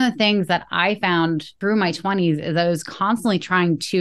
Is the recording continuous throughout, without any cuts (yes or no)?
no